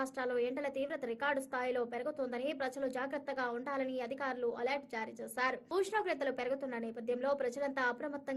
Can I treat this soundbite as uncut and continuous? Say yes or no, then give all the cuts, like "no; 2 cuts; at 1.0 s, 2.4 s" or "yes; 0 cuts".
yes; 0 cuts